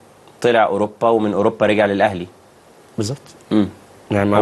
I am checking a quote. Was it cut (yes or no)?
no